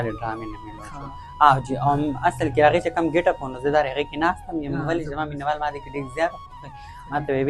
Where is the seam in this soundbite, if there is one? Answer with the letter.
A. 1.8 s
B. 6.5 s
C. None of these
C